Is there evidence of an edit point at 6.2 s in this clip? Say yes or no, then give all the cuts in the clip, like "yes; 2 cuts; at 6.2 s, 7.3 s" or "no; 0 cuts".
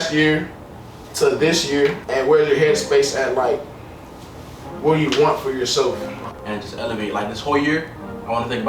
yes; 2 cuts; at 2.0 s, 6.2 s